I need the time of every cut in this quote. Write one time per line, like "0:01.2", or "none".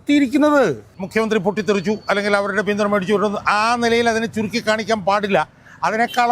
0:01.0